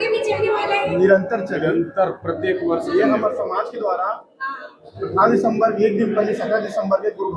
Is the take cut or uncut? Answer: uncut